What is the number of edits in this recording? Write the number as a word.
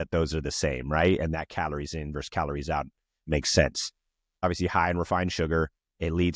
one